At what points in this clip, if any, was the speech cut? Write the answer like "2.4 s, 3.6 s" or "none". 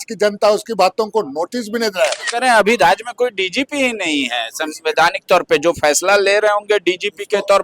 2.2 s